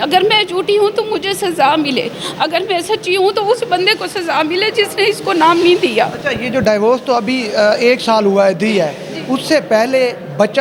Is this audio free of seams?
yes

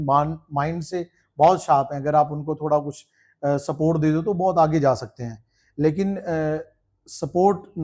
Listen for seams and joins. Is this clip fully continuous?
yes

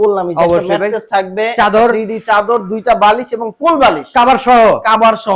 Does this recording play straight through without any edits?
yes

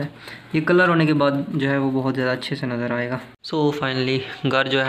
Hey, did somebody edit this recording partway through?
yes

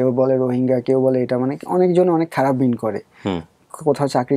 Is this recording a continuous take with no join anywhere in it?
yes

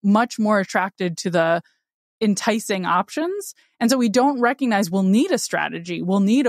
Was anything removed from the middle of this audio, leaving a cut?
no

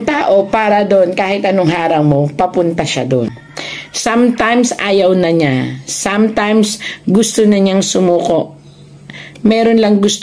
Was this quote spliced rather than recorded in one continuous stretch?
yes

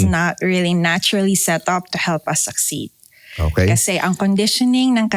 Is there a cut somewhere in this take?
no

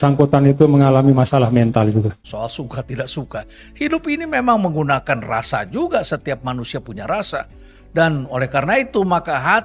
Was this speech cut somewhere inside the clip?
yes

